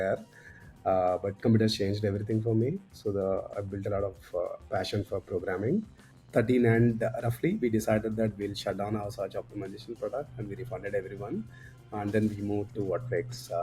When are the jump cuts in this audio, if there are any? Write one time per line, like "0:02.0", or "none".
0:06.1